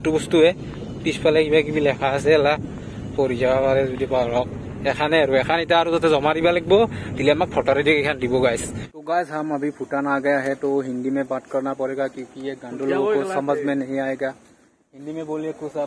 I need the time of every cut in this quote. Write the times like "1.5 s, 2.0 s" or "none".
none

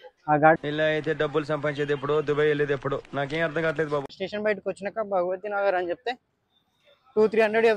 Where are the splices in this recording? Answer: 4.2 s

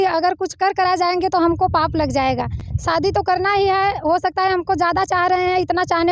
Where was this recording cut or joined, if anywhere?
none

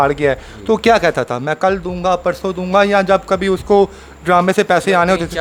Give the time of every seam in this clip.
none

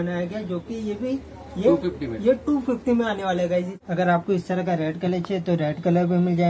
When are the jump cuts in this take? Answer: 3.7 s

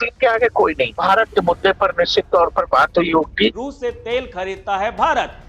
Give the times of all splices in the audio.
1.0 s, 3.7 s

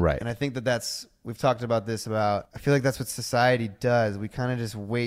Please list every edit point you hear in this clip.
2.5 s

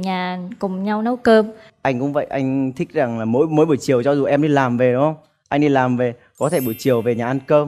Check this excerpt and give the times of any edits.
none

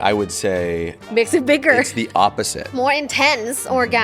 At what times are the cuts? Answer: 2.7 s

